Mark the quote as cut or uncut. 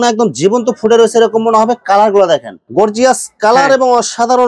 cut